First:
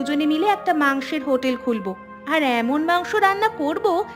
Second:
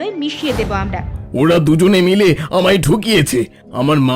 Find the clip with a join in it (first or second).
second